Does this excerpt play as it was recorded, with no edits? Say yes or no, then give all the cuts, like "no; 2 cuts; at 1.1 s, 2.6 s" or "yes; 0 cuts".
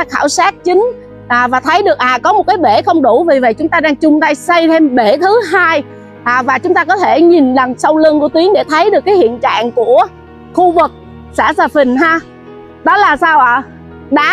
yes; 0 cuts